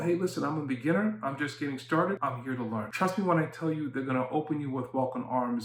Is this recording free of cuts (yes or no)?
yes